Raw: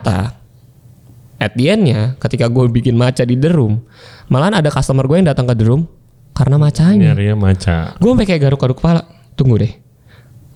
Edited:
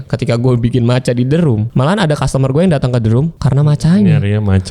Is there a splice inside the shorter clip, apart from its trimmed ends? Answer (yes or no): yes